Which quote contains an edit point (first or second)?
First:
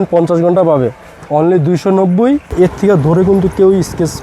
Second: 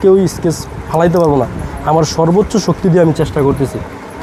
first